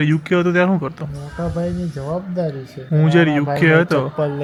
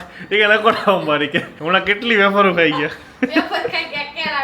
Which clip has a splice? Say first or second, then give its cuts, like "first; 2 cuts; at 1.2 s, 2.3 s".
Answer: second; 1 cut; at 1.5 s